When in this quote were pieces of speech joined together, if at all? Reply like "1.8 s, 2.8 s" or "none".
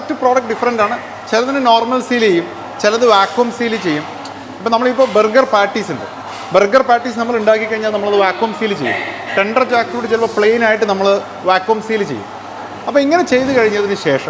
none